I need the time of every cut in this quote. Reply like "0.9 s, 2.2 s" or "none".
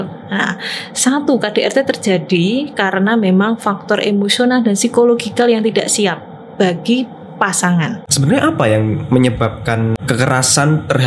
8.0 s, 10.0 s

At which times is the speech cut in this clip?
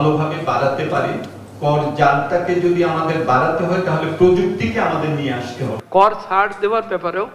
5.8 s

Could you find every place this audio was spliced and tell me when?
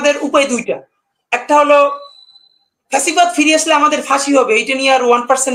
none

